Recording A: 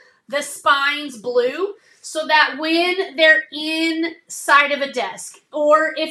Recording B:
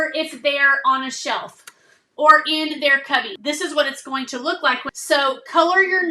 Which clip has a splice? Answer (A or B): B